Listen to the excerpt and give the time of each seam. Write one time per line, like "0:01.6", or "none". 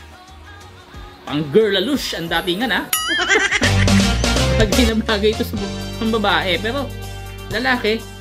none